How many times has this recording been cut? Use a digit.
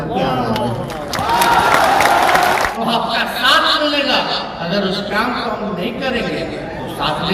1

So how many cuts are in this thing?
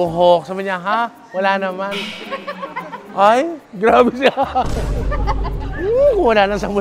0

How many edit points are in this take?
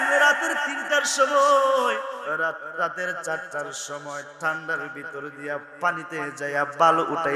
1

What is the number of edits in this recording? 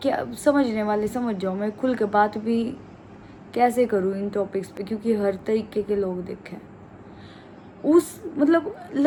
0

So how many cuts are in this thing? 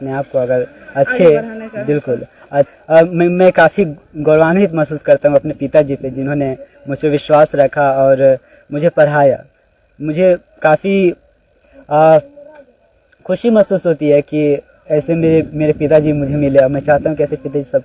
1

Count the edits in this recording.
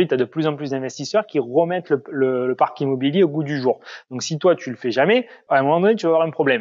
1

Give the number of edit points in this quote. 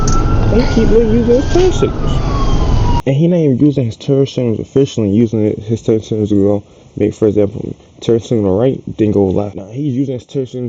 2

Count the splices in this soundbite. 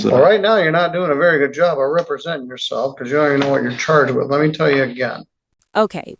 0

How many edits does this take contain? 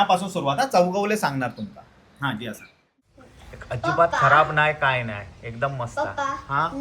1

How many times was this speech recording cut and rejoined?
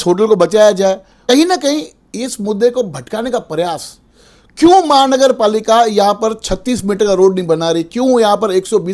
1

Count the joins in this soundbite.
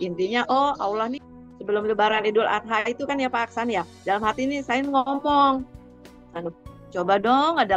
1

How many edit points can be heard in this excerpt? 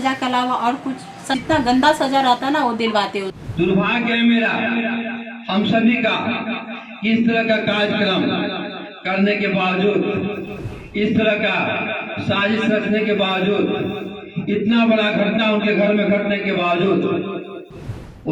2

